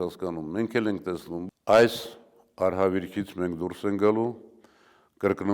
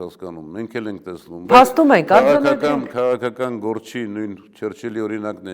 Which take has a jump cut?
first; 1 cut; at 1.4 s

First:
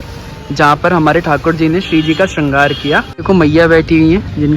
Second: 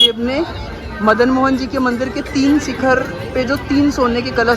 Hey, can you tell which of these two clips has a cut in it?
first; 1 cut; at 3.1 s

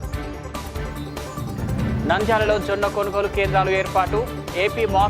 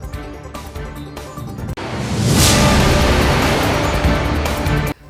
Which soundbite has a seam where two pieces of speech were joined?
first; 1 cut; at 1.7 s

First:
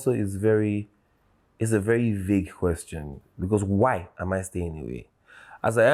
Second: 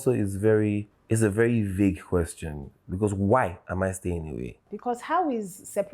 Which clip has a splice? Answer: second; 2 cuts; at 0.9 s, 4.7 s

